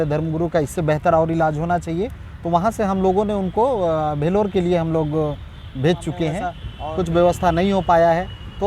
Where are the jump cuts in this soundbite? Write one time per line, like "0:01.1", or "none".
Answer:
0:06.7